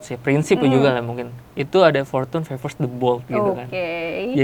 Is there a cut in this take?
no; 0 cuts

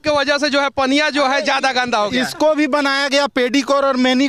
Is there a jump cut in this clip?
no; 0 cuts

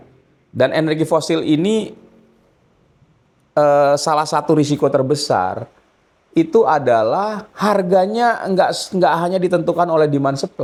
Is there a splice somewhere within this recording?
no; 0 cuts

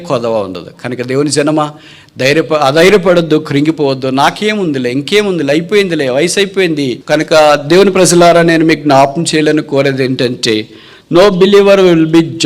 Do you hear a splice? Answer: yes; 1 cut; at 7.0 s

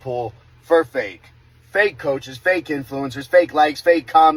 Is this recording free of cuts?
yes; 0 cuts

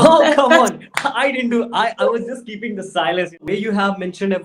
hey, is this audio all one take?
no; 1 cut; at 3.4 s

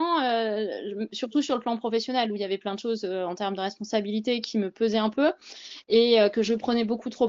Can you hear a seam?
no; 0 cuts

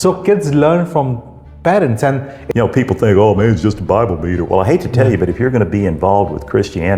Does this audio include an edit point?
yes; 1 cut; at 2.3 s

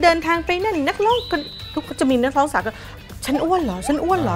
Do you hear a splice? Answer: no; 0 cuts

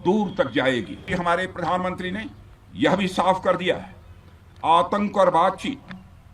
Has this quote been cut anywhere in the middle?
yes; 1 cut; at 1.1 s

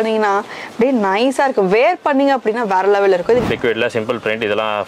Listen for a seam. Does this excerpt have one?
yes; 1 cut; at 3.4 s

